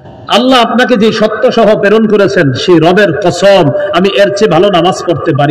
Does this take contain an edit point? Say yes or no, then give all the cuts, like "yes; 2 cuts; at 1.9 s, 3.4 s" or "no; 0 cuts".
no; 0 cuts